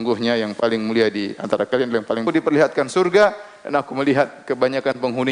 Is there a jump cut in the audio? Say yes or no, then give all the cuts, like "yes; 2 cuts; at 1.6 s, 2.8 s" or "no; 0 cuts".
yes; 1 cut; at 2.2 s